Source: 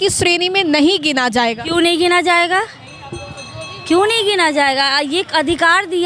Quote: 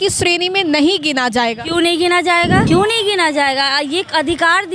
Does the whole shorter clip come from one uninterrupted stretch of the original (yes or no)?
no